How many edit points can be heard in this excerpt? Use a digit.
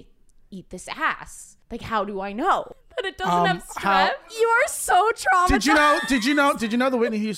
2